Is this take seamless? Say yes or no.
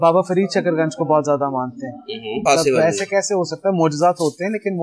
no